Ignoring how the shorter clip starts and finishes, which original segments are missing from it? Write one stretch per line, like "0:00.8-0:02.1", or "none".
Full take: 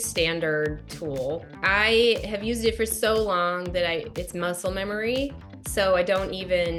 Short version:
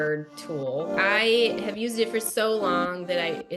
0:01.5-0:01.6